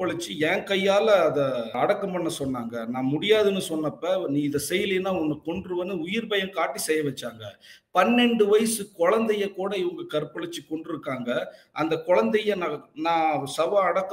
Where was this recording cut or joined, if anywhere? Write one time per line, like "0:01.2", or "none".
0:01.7